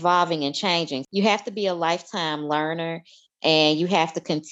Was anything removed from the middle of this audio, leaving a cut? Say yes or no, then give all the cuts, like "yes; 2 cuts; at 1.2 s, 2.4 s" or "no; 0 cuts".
yes; 1 cut; at 1.0 s